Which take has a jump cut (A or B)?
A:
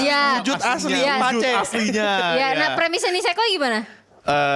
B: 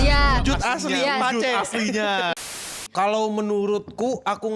B